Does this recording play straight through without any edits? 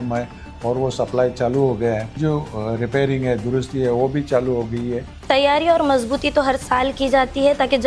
no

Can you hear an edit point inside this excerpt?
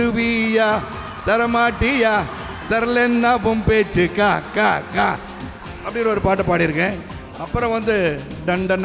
yes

